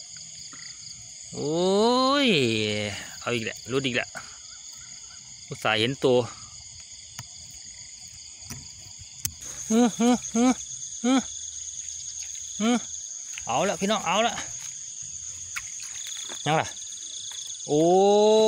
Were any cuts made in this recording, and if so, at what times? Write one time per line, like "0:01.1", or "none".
0:09.4